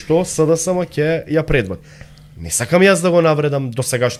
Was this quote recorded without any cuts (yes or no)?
yes